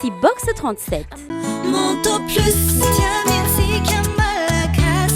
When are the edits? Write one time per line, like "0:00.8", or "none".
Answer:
0:01.2

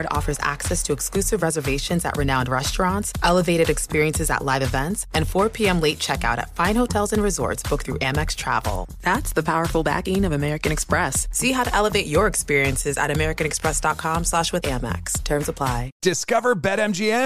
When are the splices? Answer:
0:16.0

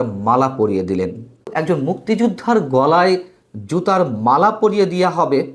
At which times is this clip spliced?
0:01.5

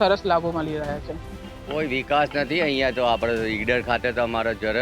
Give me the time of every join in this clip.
0:01.3

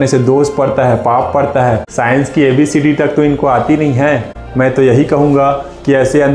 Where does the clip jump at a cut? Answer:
0:01.9
0:04.4

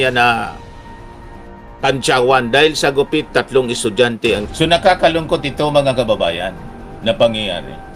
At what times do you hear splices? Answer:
0:04.5

